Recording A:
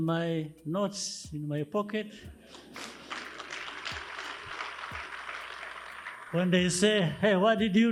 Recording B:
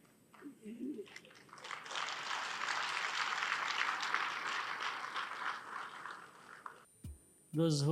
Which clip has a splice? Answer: B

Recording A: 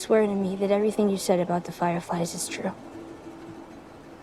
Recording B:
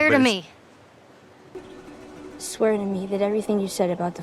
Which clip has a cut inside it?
B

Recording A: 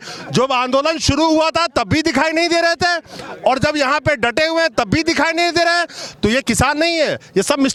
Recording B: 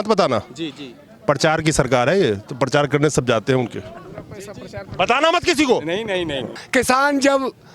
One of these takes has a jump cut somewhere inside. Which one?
B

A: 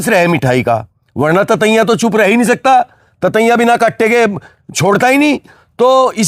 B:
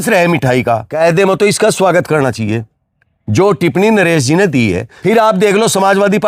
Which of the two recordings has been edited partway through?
B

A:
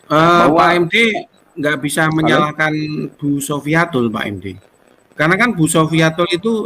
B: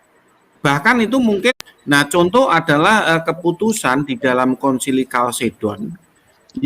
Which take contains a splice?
B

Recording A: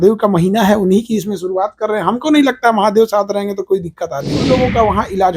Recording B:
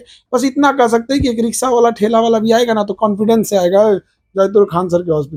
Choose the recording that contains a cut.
A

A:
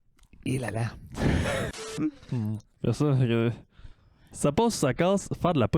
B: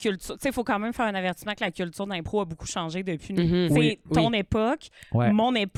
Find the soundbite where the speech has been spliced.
A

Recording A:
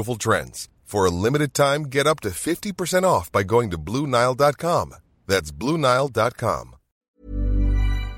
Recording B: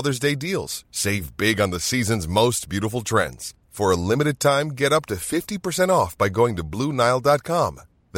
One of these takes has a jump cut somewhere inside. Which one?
A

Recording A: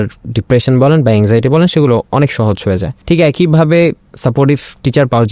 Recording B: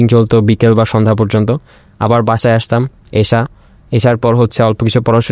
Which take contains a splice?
A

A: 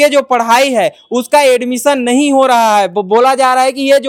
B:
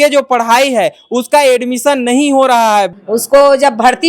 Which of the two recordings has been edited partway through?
B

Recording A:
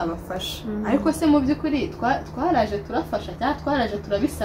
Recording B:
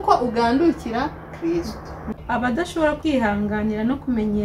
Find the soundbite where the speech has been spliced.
B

